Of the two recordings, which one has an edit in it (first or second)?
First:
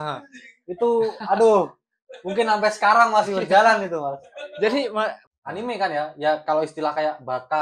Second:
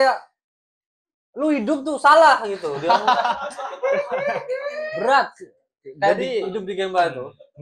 first